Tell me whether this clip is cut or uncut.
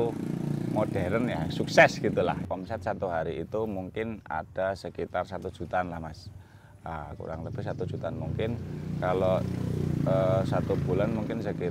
cut